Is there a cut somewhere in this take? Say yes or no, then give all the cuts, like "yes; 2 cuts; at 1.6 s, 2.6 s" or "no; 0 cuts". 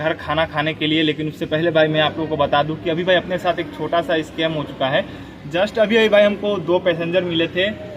no; 0 cuts